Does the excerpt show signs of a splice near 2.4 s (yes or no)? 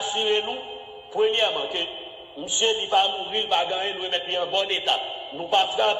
no